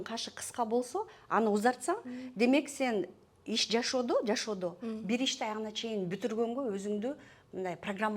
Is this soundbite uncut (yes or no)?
yes